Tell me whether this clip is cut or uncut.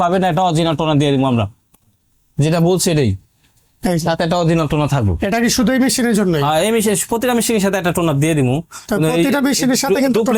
uncut